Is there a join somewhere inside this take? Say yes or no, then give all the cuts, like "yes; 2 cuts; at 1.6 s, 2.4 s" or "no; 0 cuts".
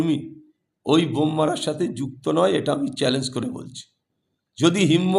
no; 0 cuts